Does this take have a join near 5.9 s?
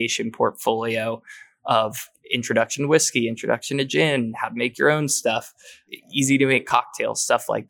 yes; 2 cuts; at 2.0 s, 5.9 s

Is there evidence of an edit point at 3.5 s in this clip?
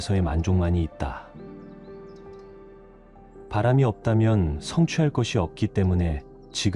yes; 2 cuts; at 1.3 s, 3.5 s

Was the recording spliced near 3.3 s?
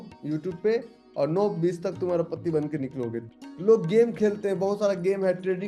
yes; 1 cut; at 3.3 s

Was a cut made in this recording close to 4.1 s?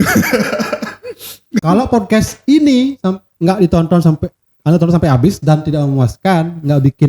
no; 1 cut; at 1.6 s

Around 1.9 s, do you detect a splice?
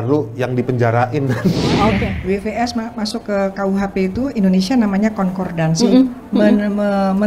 yes; 1 cut; at 1.9 s

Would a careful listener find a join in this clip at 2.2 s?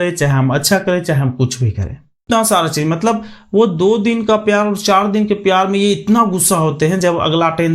yes; 1 cut; at 2.2 s

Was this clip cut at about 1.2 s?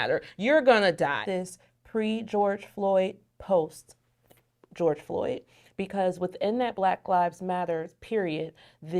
yes; 1 cut; at 1.2 s

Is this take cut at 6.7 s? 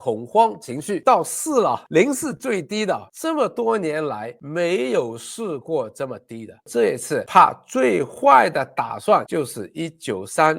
yes; 2 cuts; at 1.0 s, 6.7 s

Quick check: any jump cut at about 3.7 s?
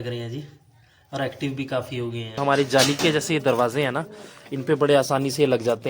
no; 1 cut; at 2.4 s

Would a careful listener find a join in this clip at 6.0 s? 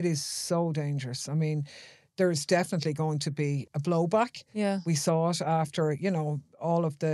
no; 1 cut; at 3.7 s

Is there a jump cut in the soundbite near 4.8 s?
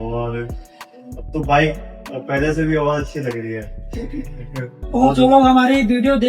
yes; 1 cut; at 4.8 s

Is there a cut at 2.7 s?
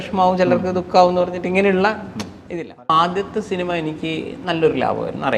yes; 1 cut; at 2.7 s

